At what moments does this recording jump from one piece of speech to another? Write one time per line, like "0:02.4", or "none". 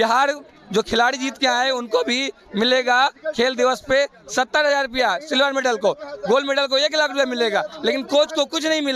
none